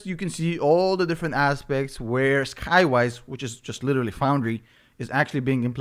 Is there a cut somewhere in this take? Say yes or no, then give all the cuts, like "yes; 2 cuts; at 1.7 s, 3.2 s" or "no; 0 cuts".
no; 0 cuts